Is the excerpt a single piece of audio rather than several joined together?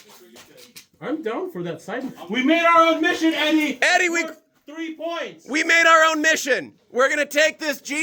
yes; 0 cuts

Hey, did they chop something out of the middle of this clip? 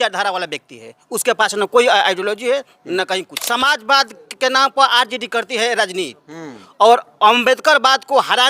yes; 1 cut; at 3.3 s

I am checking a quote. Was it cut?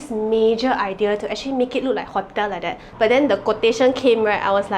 yes; 1 cut; at 2.8 s

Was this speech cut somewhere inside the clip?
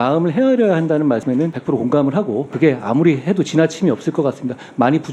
yes; 2 cuts; at 1.4 s, 2.5 s

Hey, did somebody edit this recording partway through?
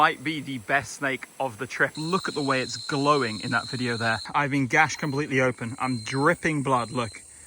yes; 2 cuts; at 1.9 s, 4.2 s

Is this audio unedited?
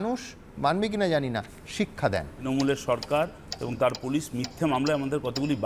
no; 1 cut; at 2.4 s

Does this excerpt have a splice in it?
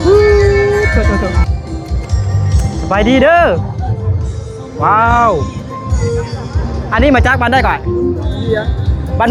no; 0 cuts

